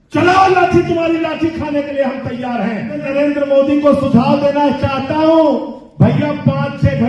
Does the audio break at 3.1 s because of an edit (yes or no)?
yes